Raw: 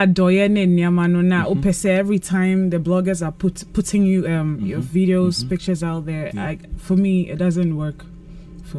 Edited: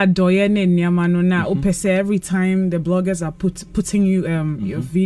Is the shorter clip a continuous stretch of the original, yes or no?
yes